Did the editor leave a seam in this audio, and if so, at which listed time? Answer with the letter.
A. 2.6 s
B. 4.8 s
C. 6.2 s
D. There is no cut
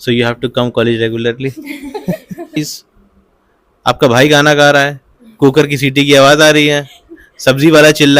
A